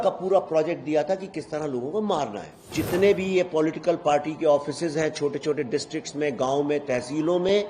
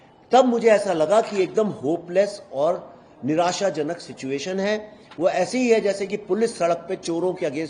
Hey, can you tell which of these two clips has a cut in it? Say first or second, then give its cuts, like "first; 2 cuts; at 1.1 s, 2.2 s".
first; 1 cut; at 2.7 s